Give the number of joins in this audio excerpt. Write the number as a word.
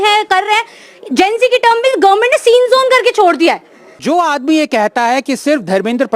one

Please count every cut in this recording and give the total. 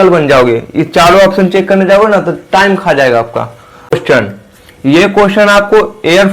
one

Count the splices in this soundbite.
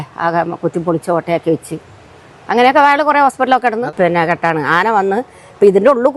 one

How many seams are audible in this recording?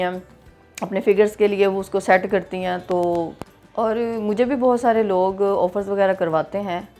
one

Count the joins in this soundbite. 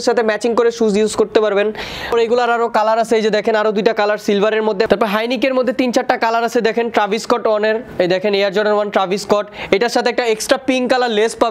two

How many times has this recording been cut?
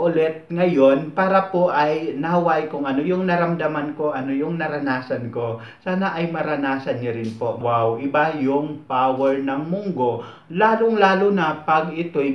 one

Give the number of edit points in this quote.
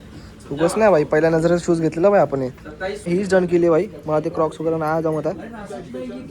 one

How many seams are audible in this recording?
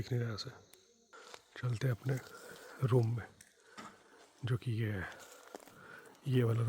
one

